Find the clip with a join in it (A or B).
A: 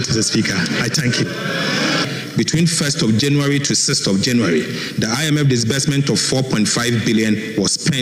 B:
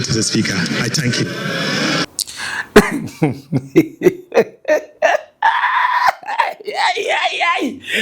A